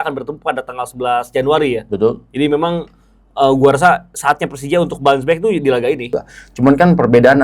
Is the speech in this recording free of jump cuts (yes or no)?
no